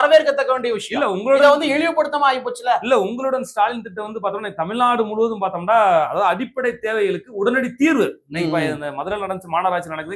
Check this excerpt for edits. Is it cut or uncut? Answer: uncut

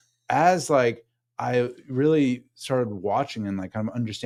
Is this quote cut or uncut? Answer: uncut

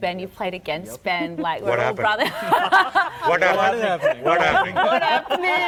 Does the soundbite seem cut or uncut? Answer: uncut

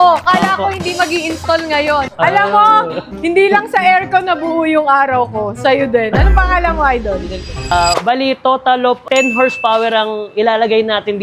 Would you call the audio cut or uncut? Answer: cut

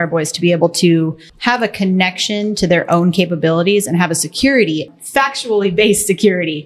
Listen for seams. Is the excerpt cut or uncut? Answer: cut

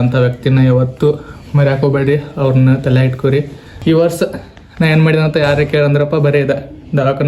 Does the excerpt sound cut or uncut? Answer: cut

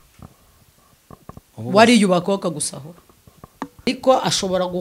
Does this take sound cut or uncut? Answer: cut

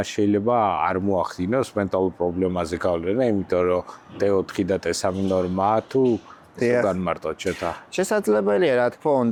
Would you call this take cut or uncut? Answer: uncut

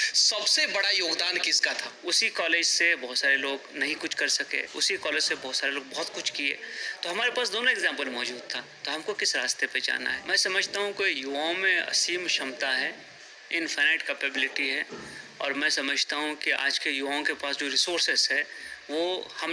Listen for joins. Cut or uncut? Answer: cut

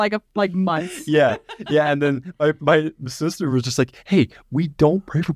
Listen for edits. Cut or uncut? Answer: uncut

